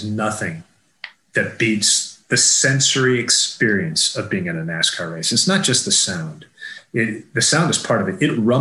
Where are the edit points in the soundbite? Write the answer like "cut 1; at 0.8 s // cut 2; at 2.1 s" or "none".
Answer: none